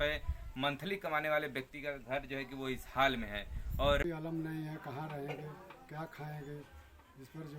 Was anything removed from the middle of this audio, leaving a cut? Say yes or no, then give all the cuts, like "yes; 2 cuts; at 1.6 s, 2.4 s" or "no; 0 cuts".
yes; 1 cut; at 4.0 s